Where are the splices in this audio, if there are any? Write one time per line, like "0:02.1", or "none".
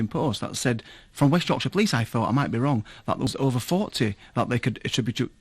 0:03.3